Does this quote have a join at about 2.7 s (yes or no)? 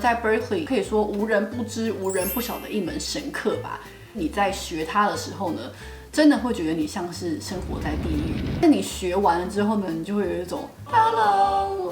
no